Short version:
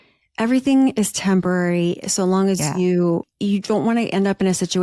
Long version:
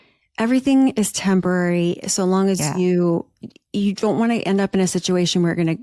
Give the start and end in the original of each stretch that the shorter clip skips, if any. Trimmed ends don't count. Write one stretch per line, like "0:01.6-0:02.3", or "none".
0:03.3-0:03.6